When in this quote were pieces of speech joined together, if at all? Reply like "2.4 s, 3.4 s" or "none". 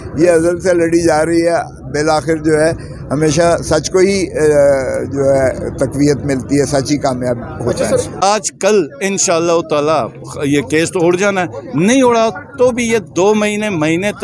8.2 s